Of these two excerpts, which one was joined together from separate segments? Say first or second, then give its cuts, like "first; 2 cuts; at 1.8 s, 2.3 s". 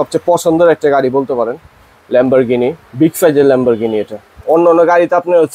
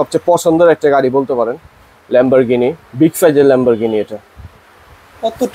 first; 1 cut; at 4.4 s